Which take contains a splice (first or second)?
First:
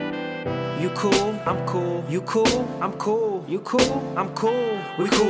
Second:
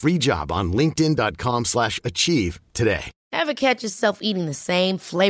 second